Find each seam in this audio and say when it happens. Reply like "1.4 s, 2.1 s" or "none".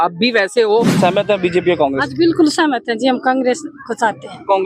1.0 s